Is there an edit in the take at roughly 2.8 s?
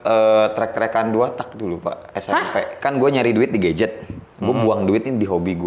yes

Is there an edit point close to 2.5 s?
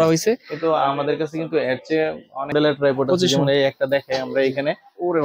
yes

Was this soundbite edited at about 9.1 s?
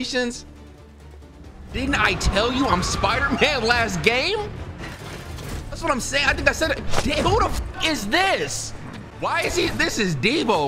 yes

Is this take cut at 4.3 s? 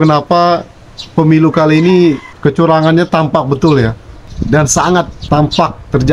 yes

